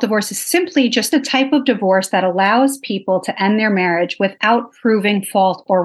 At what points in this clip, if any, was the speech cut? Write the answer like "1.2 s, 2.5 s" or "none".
1.1 s